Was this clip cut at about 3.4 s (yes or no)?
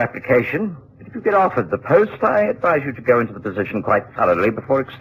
yes